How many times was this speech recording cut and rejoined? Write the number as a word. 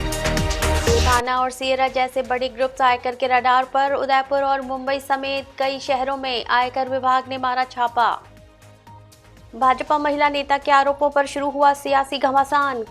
one